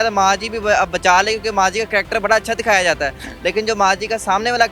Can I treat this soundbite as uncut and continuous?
yes; 0 cuts

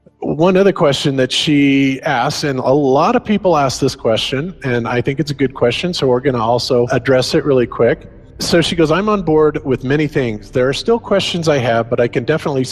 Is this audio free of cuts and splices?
yes; 0 cuts

